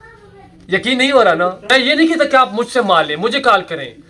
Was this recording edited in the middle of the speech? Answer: yes; 1 cut; at 1.8 s

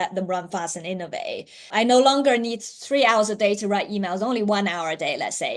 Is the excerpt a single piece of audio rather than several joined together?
no; 1 cut; at 1.7 s

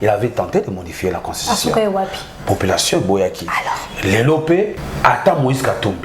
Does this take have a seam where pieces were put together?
yes; 1 cut; at 4.8 s

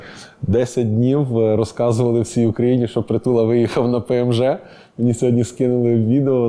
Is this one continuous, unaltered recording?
yes; 0 cuts

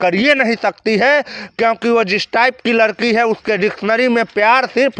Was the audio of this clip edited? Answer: no; 0 cuts

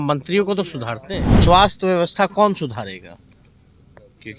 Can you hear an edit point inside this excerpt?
yes; 1 cut; at 1.3 s

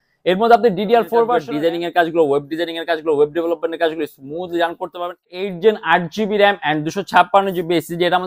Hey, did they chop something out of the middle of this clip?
yes; 2 cuts; at 1.4 s, 5.4 s

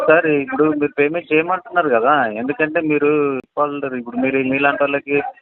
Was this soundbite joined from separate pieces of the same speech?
yes; 1 cut; at 3.4 s

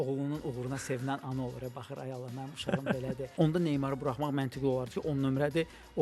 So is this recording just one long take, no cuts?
no; 1 cut; at 3.3 s

